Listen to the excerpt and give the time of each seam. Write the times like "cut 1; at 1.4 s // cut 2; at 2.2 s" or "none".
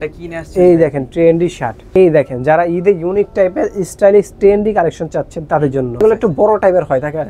cut 1; at 1.8 s // cut 2; at 6.0 s